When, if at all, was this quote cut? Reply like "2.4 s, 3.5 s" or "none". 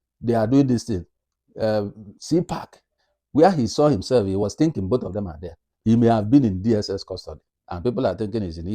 5.7 s